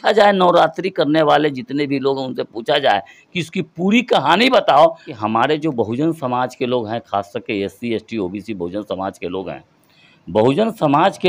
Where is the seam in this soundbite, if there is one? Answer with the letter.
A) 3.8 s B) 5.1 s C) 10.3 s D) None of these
B